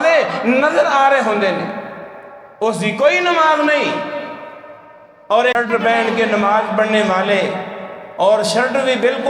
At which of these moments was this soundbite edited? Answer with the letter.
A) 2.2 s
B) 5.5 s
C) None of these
B